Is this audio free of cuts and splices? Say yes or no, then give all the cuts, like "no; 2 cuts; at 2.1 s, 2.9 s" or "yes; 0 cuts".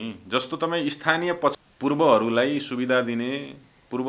no; 1 cut; at 1.6 s